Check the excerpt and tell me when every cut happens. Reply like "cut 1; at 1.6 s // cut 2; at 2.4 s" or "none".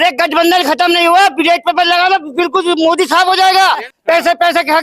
cut 1; at 3.9 s